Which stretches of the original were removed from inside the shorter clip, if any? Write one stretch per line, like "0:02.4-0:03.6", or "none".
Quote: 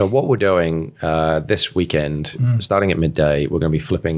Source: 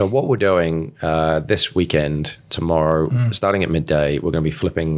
0:02.5-0:03.2